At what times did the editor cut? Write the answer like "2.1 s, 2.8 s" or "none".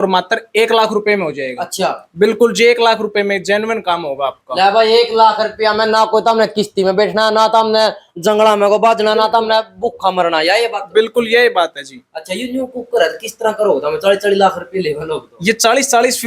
none